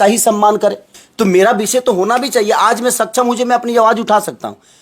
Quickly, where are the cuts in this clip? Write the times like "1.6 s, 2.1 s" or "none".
1.0 s